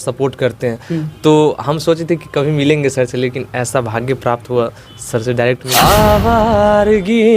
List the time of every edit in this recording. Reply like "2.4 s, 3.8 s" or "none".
5.6 s